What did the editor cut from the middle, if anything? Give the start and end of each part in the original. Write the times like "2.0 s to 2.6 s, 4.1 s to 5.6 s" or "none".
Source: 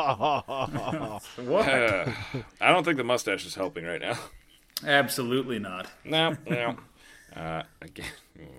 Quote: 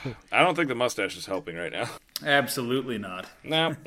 4.3 s to 4.7 s